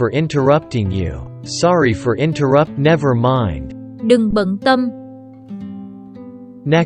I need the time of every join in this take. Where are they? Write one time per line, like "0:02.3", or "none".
0:01.4